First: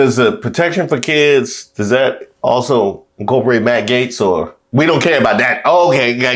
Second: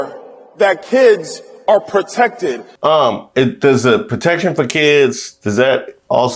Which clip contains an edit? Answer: second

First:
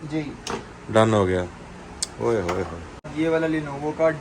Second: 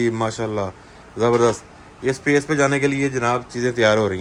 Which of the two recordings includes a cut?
first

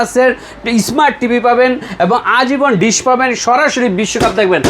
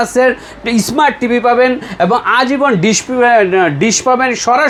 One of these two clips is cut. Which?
first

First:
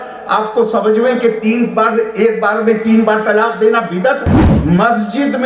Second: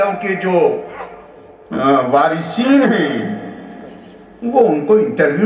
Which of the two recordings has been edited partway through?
first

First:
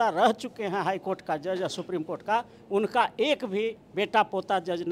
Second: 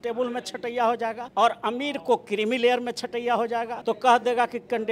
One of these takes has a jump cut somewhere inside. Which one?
second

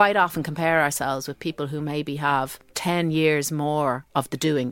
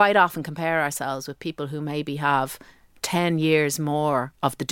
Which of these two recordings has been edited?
first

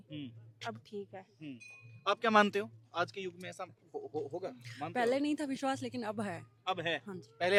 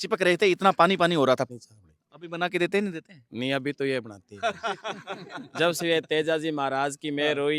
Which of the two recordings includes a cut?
second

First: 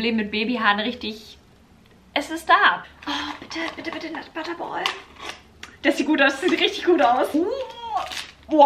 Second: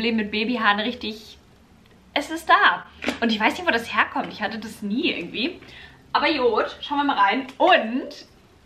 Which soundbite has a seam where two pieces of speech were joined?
first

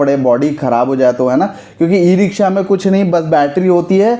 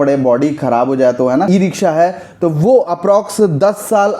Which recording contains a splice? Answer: second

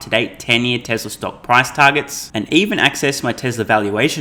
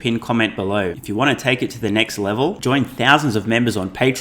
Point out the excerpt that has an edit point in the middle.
second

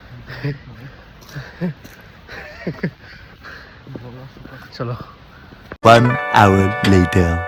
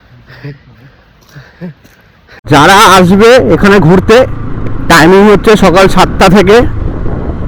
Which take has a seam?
second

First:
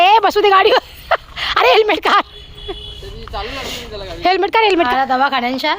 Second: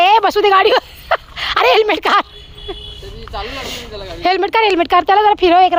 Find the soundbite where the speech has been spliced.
first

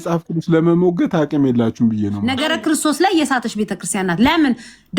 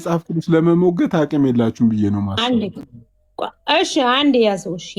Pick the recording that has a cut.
first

